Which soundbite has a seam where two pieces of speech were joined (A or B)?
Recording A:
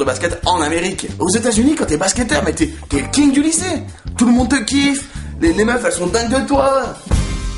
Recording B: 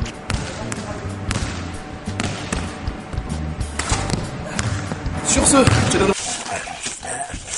B